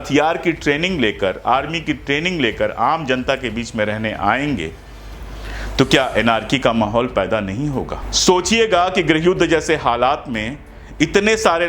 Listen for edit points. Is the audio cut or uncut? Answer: cut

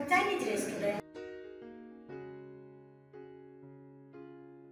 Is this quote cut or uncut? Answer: uncut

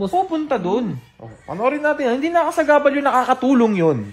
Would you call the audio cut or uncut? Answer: uncut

